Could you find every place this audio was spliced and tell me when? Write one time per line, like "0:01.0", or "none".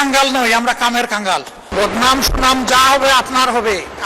0:01.7